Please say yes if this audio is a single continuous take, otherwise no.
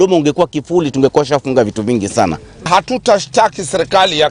no